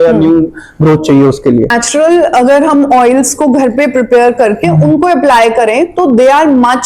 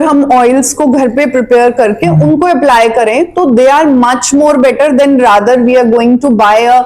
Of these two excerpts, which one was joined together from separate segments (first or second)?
first